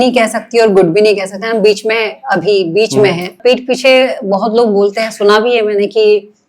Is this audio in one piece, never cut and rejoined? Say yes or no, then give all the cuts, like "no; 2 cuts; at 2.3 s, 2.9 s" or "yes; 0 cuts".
no; 1 cut; at 3.4 s